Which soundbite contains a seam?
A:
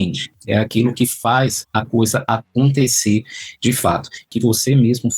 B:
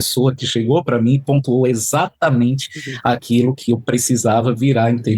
A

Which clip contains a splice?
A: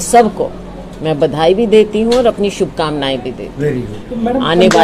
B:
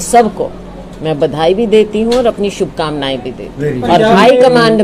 B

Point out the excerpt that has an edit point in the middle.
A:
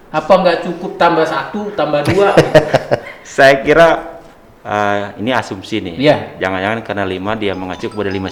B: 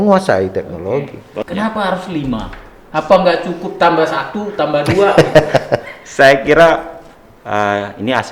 B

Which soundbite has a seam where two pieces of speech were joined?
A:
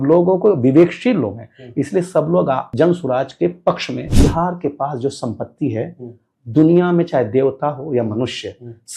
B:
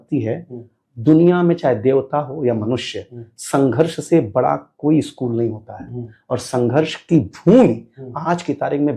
A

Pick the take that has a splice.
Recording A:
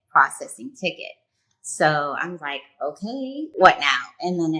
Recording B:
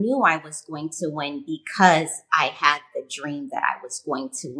A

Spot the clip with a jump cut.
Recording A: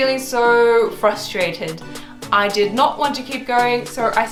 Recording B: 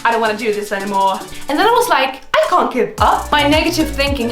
B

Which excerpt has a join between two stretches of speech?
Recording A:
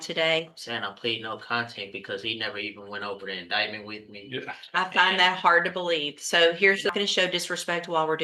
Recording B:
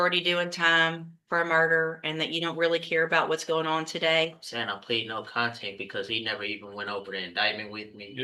A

